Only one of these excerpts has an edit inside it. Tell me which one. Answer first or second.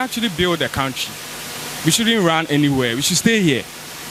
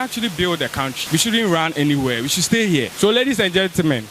second